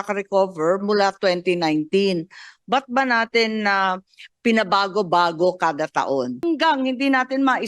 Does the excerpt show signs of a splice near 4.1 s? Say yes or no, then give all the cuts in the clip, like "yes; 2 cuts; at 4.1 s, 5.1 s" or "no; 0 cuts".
no; 1 cut; at 6.5 s